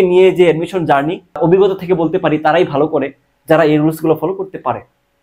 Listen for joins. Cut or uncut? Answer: cut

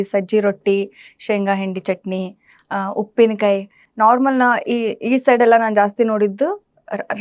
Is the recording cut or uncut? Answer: uncut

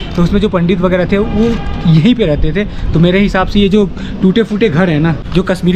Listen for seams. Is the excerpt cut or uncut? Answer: uncut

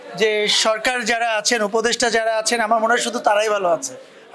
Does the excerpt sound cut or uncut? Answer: uncut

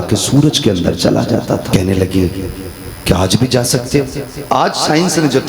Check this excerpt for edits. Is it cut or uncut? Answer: cut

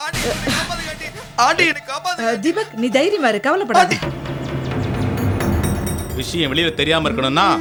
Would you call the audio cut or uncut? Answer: uncut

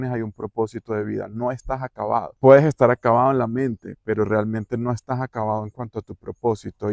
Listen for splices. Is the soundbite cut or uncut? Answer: cut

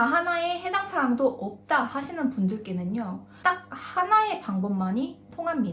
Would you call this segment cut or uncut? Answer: cut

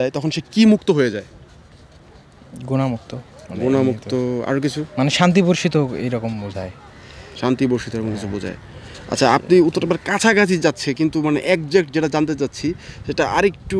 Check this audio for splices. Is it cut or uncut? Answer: uncut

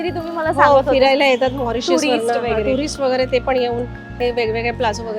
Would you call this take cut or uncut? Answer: uncut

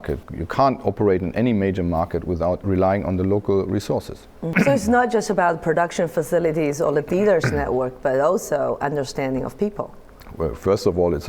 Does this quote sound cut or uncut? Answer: cut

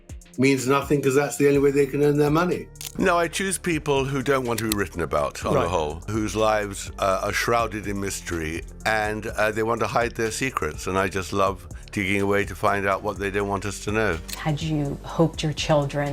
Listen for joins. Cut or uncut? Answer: cut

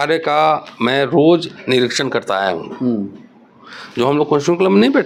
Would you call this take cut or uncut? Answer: uncut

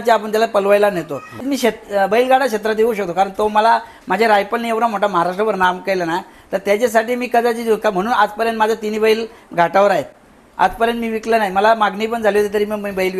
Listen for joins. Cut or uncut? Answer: cut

